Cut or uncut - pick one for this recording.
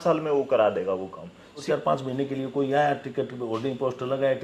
cut